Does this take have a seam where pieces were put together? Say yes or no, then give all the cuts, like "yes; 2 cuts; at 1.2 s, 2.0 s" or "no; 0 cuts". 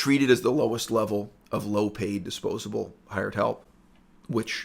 no; 0 cuts